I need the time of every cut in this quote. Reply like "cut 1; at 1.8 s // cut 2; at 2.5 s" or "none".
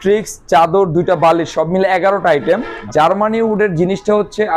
cut 1; at 2.7 s

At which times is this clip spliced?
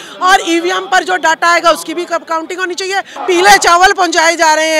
cut 1; at 3.1 s

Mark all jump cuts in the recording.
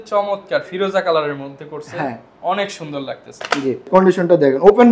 cut 1; at 3.9 s

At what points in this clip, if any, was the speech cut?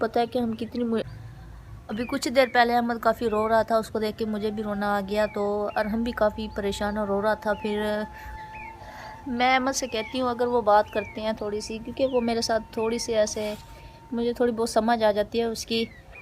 cut 1; at 1.0 s // cut 2; at 8.3 s

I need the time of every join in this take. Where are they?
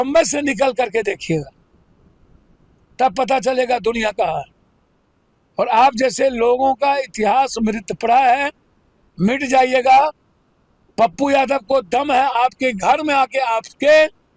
none

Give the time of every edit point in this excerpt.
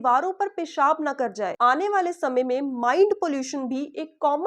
cut 1; at 1.5 s

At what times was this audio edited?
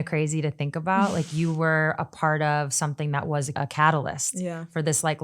cut 1; at 3.5 s

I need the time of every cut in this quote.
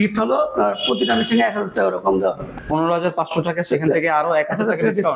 cut 1; at 2.5 s

